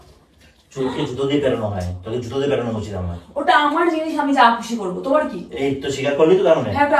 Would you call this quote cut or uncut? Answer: uncut